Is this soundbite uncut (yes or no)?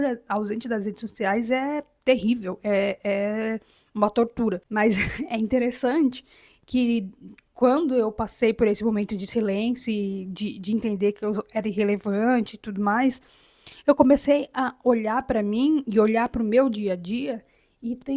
yes